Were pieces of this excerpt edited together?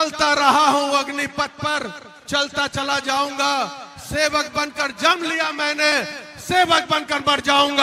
no; 0 cuts

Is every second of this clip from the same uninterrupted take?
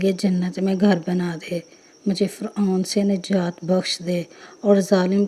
yes; 0 cuts

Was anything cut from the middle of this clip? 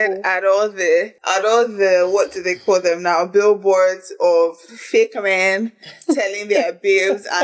yes; 1 cut; at 1.2 s

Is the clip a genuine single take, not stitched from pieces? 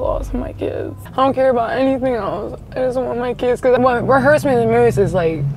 no; 2 cuts; at 1.0 s, 3.8 s

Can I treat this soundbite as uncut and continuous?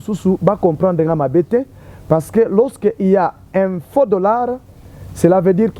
yes; 0 cuts

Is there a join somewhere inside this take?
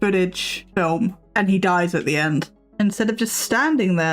yes; 2 cuts; at 0.9 s, 2.6 s

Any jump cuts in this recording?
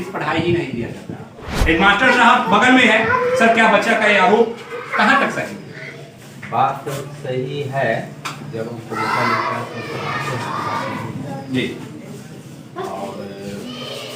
no; 0 cuts

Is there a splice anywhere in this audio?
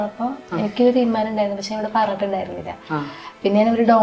no; 0 cuts

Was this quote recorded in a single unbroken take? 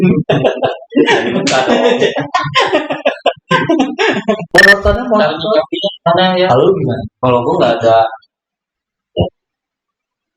no; 1 cut; at 4.4 s

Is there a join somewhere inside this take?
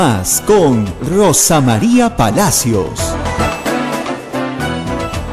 no; 0 cuts

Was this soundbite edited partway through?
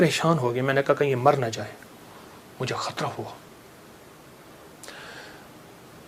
no; 0 cuts

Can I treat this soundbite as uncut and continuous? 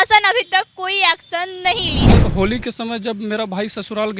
no; 1 cut; at 2.1 s

